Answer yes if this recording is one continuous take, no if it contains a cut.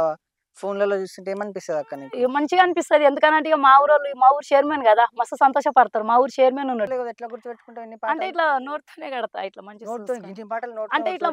no